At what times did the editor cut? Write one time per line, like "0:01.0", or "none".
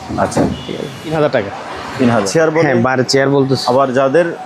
0:01.1
0:02.3